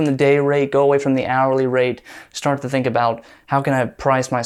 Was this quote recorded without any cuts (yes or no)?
yes